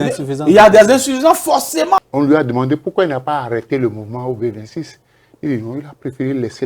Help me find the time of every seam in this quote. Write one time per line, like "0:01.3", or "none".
0:02.0

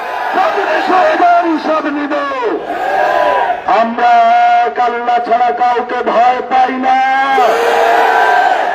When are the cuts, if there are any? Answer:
0:03.6

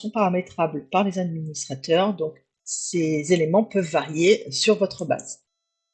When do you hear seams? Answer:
none

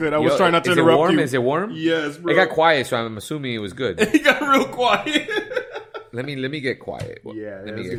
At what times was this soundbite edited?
none

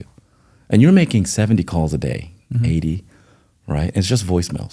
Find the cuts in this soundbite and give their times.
none

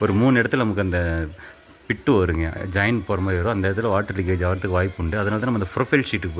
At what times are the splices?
none

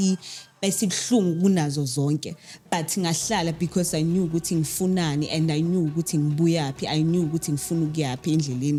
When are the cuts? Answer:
none

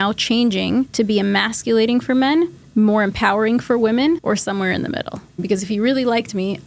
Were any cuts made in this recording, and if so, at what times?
0:00.9
0:02.6
0:04.2
0:05.4

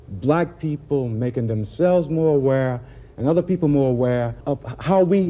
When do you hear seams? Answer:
0:04.4

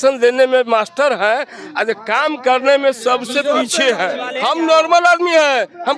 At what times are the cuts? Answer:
0:04.2

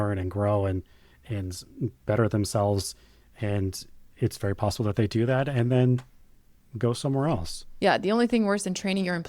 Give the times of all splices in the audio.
0:07.6

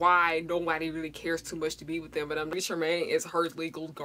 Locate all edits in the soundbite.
0:02.5

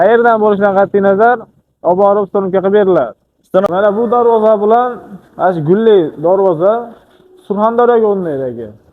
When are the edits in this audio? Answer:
0:03.7

